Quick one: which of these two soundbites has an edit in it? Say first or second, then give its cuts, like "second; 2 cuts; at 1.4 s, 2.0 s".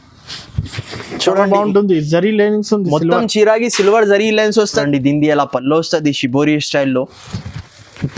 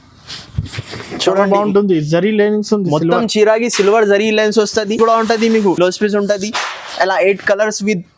first; 1 cut; at 4.8 s